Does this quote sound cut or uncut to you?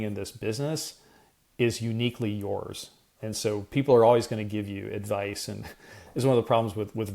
cut